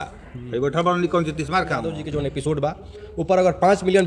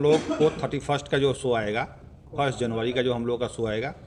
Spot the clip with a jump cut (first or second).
first